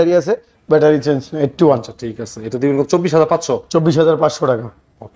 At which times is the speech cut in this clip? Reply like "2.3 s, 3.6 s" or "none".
none